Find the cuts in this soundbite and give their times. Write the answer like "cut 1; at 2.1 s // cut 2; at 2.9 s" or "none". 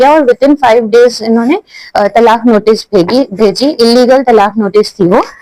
none

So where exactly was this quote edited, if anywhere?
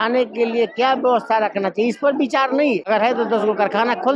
cut 1; at 2.8 s

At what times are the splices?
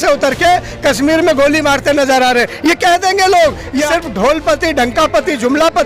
cut 1; at 3.9 s

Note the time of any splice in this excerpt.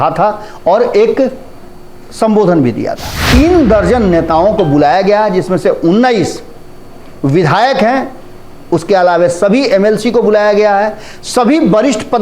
cut 1; at 3.1 s

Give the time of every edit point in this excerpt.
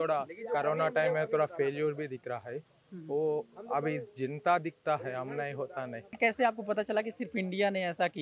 cut 1; at 6.2 s

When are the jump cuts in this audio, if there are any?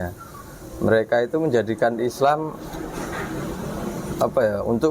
none

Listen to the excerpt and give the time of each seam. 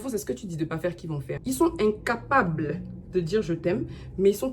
cut 1; at 1.3 s

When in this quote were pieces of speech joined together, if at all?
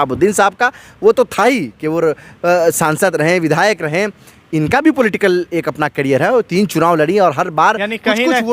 none

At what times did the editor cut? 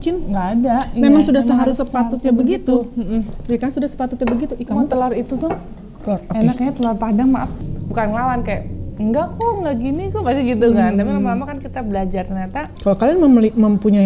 cut 1; at 7.6 s // cut 2; at 12.7 s

